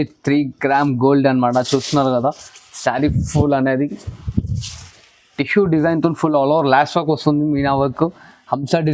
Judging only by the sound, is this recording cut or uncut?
uncut